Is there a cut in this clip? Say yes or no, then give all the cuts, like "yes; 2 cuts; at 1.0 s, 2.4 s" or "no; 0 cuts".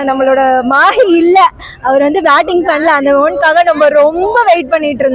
no; 0 cuts